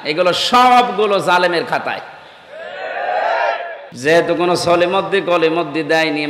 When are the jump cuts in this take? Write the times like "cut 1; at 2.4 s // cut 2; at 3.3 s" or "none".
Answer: cut 1; at 3.8 s